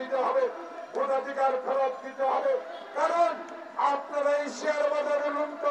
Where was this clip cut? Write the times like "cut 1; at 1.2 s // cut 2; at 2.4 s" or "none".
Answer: none

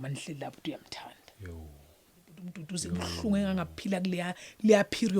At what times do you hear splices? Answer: cut 1; at 2.6 s

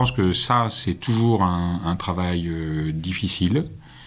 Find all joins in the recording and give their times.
none

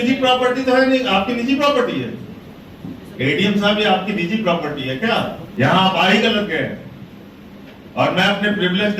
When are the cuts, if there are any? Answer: cut 1; at 5.4 s

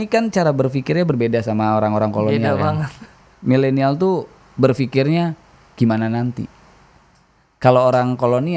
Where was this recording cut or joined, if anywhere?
none

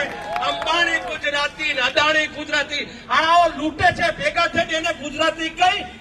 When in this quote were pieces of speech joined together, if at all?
none

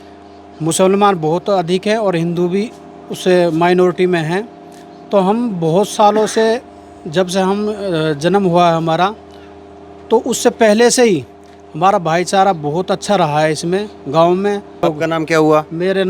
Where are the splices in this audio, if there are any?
cut 1; at 14.8 s

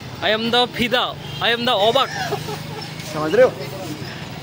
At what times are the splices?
none

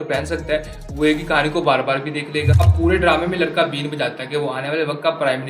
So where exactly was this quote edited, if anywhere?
cut 1; at 2.5 s

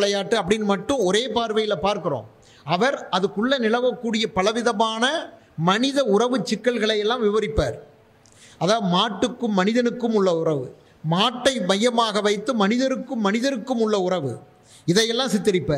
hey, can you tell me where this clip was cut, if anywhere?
none

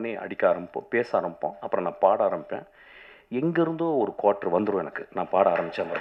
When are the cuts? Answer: none

